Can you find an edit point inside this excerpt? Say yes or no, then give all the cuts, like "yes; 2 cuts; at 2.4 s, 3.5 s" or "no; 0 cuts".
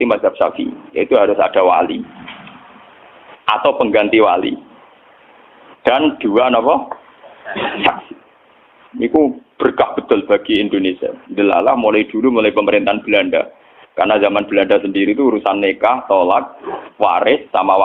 no; 0 cuts